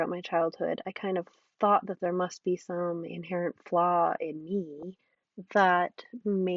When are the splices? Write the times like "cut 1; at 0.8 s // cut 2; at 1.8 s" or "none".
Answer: none

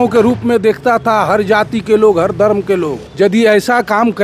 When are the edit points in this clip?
cut 1; at 3.0 s

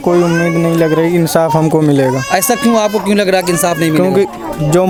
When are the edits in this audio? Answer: none

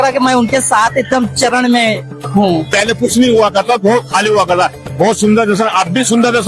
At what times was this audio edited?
cut 1; at 2.7 s

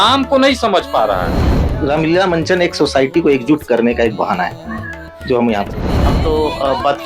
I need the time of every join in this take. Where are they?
cut 1; at 1.6 s // cut 2; at 6.2 s

